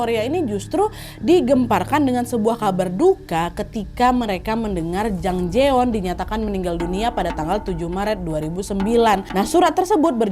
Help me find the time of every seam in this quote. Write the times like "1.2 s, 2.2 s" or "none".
9.3 s